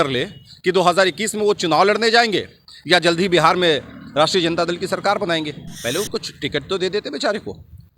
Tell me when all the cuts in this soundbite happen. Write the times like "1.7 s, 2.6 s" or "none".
5.7 s